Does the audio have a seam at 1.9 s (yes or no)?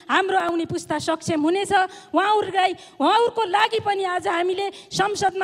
no